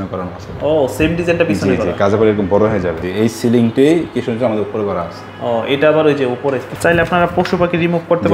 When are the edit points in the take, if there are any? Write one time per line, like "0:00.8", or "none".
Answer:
0:03.1
0:06.7